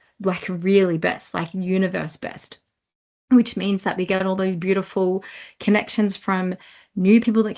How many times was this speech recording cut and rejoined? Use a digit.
0